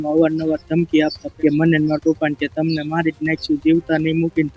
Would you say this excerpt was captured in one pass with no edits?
no; 1 cut; at 1.3 s

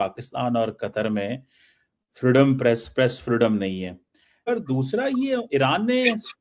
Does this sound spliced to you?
yes; 1 cut; at 4.5 s

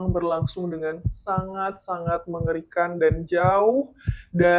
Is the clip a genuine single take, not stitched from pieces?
yes; 0 cuts

